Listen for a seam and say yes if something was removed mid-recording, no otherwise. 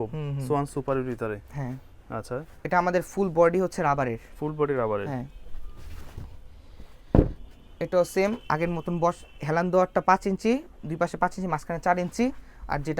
no